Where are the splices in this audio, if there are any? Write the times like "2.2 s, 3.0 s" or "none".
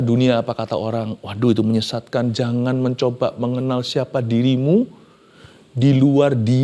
3.0 s